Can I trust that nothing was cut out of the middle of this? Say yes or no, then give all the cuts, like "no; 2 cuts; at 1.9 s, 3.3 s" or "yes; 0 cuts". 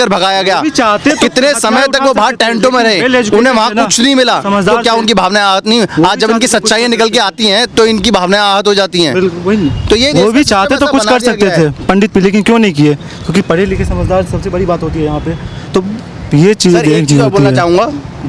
yes; 0 cuts